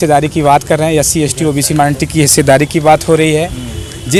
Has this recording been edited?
no; 0 cuts

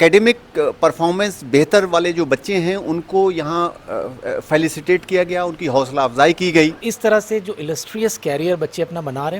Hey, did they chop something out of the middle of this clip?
yes; 1 cut; at 6.9 s

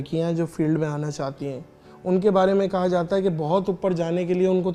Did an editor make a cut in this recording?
no; 0 cuts

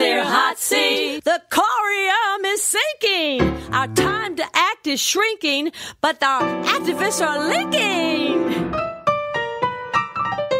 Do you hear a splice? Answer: no; 0 cuts

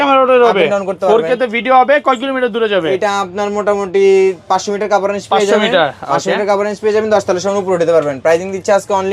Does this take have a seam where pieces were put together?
no; 0 cuts

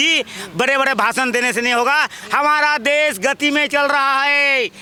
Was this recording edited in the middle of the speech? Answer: no; 0 cuts

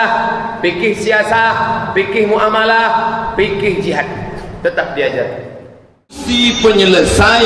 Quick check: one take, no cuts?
no; 1 cut; at 6.3 s

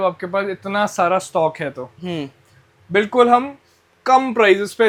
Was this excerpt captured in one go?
yes; 0 cuts

